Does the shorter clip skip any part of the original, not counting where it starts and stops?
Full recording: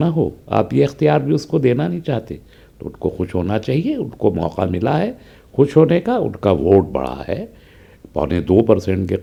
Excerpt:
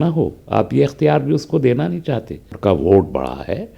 yes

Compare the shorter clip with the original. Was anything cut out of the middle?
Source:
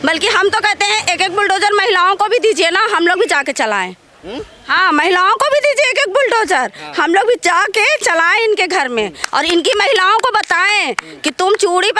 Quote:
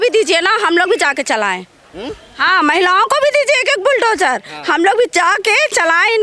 no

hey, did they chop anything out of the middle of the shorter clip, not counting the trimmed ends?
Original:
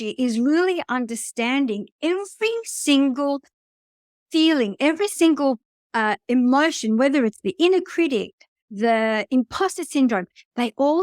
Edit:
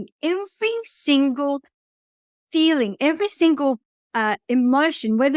no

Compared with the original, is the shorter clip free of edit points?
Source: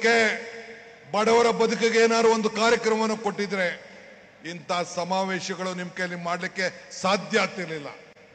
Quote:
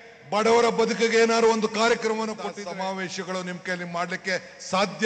no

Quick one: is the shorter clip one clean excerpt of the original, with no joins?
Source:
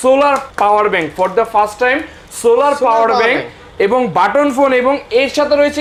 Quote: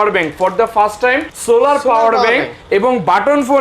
no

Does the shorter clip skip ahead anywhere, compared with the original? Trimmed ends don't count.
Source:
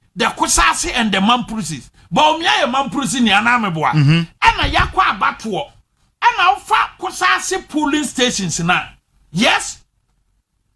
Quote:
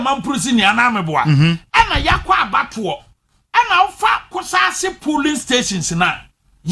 no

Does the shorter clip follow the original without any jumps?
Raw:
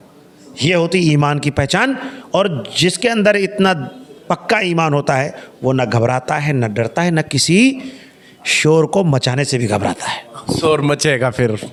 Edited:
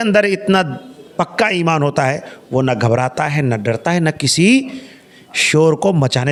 yes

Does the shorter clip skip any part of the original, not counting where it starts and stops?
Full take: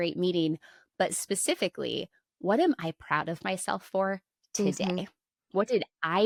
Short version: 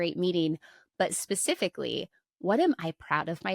no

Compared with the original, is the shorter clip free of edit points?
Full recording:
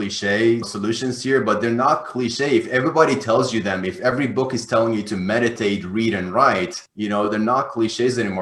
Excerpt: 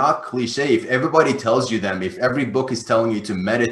yes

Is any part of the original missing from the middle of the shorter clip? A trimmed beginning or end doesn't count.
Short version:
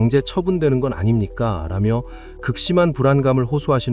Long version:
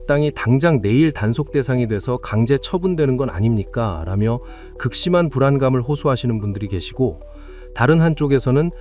no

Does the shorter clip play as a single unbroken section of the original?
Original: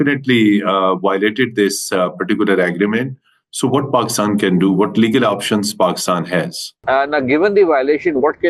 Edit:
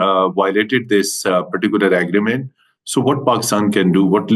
yes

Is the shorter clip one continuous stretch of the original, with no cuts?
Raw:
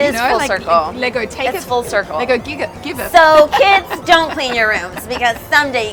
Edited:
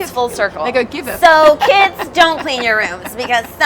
no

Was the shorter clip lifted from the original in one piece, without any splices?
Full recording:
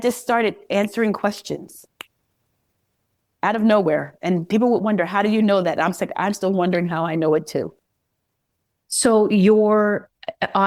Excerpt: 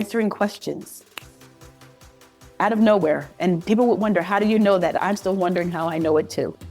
no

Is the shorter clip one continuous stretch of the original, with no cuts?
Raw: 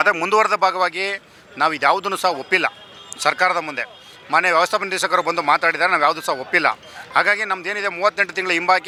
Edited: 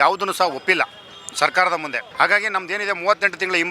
no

